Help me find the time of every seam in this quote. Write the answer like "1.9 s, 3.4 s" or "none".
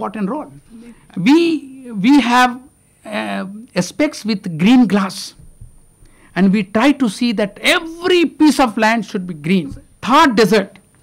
0.9 s, 9.9 s